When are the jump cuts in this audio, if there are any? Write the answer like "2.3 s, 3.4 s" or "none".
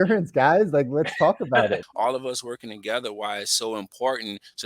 1.9 s